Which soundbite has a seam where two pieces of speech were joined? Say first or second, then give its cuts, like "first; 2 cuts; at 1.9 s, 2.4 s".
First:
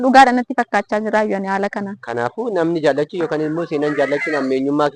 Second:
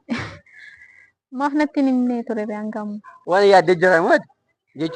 second; 1 cut; at 3.1 s